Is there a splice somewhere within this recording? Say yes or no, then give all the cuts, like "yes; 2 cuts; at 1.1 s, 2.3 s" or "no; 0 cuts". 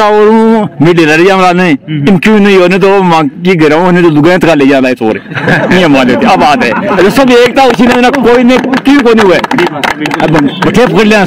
no; 0 cuts